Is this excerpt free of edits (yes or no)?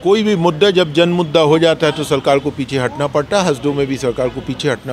yes